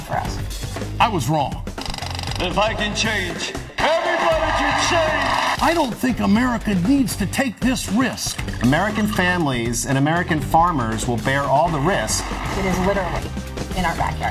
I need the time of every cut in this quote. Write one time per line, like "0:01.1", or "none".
none